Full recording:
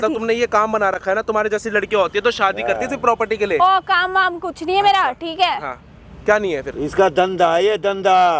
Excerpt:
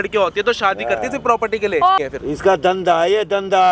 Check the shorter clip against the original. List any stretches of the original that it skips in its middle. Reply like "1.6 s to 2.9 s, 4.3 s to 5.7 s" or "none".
3.8 s to 6.5 s